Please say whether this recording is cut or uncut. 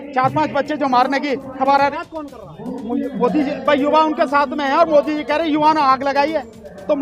cut